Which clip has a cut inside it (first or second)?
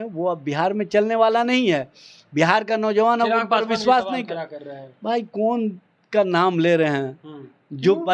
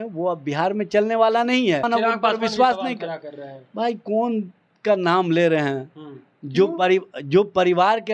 second